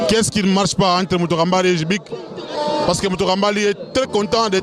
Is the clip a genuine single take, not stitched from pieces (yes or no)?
yes